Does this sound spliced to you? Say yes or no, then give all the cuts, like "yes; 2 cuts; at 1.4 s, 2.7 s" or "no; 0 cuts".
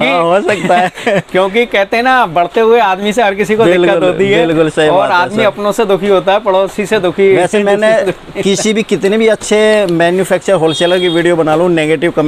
no; 0 cuts